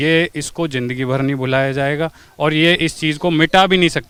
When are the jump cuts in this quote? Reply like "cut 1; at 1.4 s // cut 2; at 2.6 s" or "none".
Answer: none